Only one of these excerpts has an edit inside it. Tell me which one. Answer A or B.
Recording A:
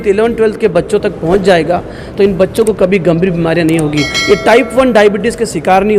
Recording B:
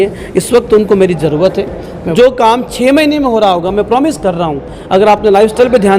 B